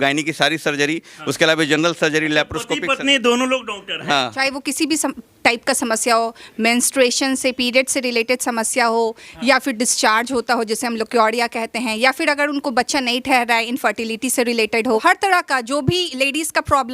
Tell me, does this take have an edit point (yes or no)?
yes